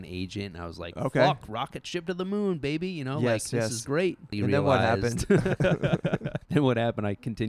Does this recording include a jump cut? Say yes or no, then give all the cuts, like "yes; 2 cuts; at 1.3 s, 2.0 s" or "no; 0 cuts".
yes; 2 cuts; at 4.3 s, 6.4 s